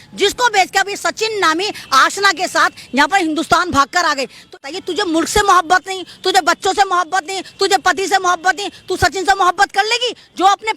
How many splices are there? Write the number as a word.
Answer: one